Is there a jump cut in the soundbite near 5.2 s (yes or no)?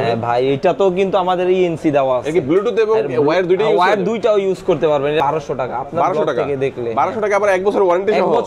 yes